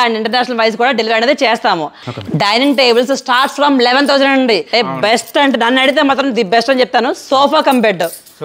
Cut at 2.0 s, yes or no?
yes